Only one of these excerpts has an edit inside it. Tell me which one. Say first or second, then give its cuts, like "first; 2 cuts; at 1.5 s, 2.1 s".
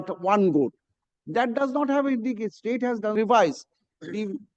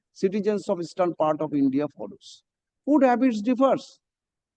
first; 1 cut; at 3.1 s